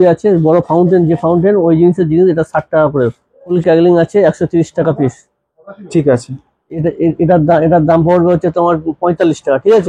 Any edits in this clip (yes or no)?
yes